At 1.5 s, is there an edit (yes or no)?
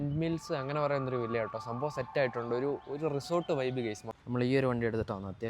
no